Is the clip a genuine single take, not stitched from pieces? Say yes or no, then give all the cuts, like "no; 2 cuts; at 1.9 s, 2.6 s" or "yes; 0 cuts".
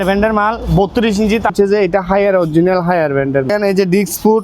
no; 2 cuts; at 1.5 s, 3.5 s